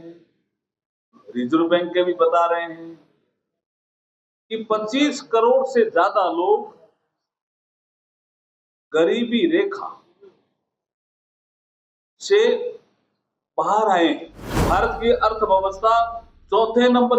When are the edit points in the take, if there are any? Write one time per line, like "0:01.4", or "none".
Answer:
0:14.6